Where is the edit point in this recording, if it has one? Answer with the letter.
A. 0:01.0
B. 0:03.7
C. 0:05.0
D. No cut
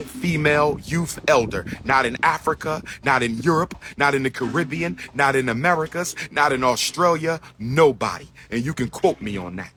D